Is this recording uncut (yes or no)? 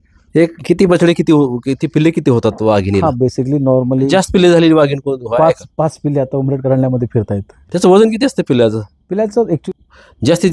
no